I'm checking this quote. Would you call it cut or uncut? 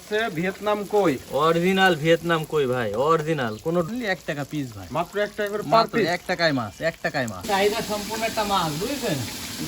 cut